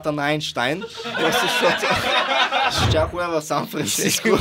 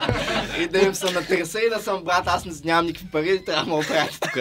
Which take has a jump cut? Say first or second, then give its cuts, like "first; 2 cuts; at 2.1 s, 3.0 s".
first; 1 cut; at 2.8 s